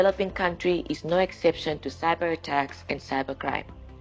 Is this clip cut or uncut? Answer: uncut